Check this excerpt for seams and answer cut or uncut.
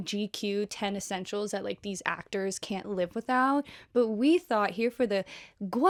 uncut